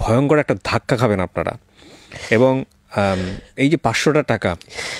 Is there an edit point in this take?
no; 0 cuts

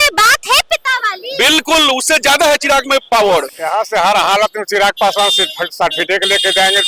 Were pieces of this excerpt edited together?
yes; 1 cut; at 3.5 s

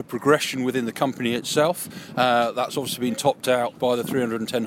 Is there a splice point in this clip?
no; 0 cuts

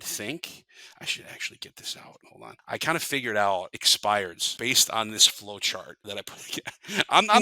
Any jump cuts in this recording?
yes; 4 cuts; at 2.3 s, 3.8 s, 4.4 s, 5.9 s

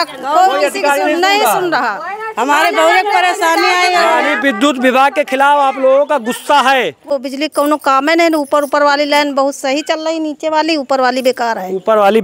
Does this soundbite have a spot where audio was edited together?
yes; 1 cut; at 7.1 s

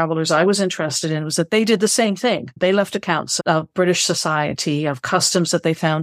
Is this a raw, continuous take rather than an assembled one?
no; 1 cut; at 2.5 s

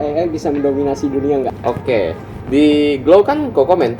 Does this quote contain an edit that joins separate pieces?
yes; 1 cut; at 1.5 s

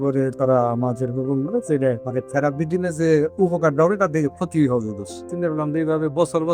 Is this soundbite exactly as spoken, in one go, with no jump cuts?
no; 2 cuts; at 2.0 s, 5.3 s

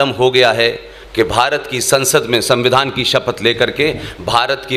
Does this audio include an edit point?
no; 0 cuts

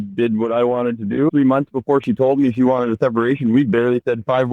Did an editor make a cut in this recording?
yes; 1 cut; at 1.3 s

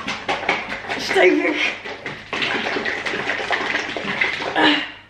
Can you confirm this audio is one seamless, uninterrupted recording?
yes; 0 cuts

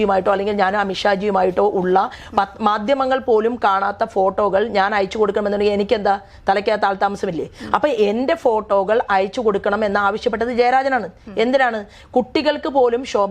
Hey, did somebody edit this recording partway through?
no; 0 cuts

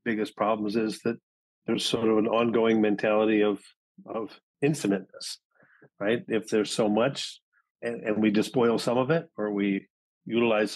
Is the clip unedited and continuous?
yes; 0 cuts

